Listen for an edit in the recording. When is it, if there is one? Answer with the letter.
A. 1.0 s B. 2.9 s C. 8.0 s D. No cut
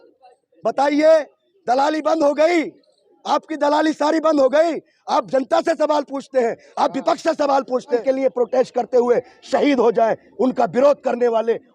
C